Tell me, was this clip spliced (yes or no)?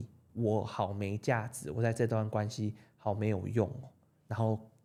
no